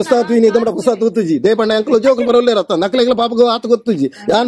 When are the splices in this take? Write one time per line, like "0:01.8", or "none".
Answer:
none